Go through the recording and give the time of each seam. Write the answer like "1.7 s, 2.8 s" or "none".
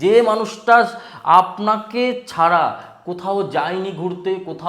none